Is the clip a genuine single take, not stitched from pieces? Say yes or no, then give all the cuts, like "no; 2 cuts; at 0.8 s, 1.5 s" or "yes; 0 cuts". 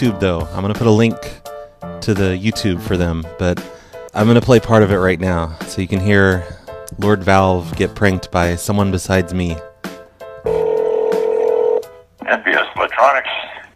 no; 1 cut; at 2.6 s